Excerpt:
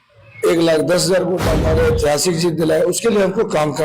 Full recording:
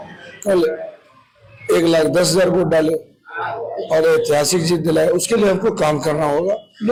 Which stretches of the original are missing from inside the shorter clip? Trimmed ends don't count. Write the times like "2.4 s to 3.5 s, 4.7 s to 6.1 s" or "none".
2.8 s to 3.8 s

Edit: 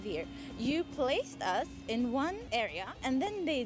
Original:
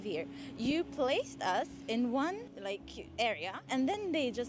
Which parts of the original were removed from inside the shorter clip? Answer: 2.4 s to 3.1 s

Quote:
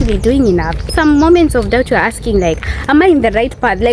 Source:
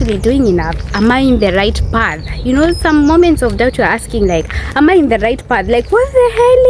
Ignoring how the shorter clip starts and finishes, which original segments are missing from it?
0.9 s to 2.8 s

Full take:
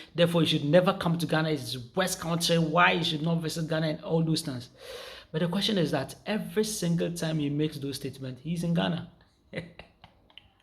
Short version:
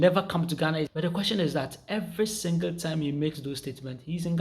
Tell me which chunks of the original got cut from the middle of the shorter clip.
1.6 s to 5.3 s

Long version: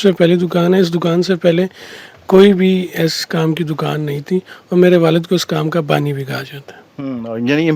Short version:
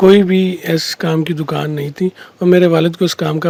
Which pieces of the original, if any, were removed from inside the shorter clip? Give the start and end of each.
none

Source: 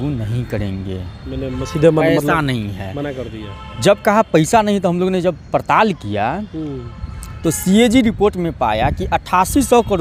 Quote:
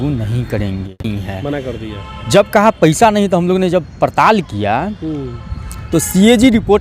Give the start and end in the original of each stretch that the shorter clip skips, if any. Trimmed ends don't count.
1.1 s to 2.7 s

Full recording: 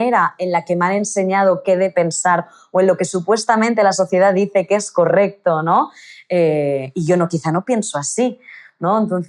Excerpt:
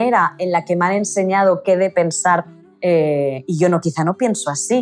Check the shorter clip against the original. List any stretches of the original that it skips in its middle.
2.6 s to 6.0 s

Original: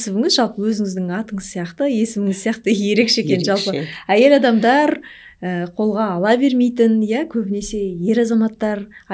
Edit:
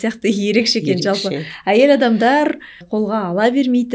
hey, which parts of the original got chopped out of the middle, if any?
5.2 s to 5.6 s

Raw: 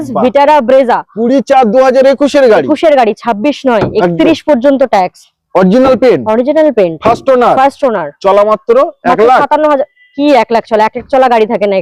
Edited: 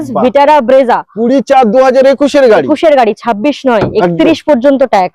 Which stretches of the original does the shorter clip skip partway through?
none

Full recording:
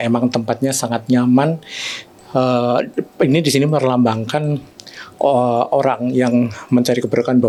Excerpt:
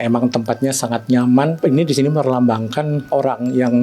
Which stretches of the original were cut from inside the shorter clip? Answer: 1.5 s to 3.1 s, 4.6 s to 5.7 s

